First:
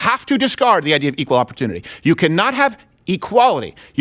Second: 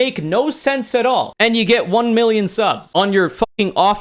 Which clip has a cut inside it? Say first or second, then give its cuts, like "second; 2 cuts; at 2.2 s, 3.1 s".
second; 2 cuts; at 1.3 s, 2.8 s